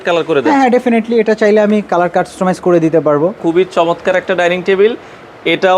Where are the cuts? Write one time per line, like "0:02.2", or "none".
0:03.4